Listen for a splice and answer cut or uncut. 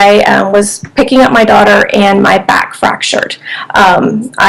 uncut